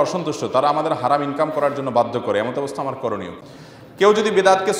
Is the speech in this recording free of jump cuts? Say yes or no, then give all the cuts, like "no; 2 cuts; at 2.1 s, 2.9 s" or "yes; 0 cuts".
no; 1 cut; at 3.4 s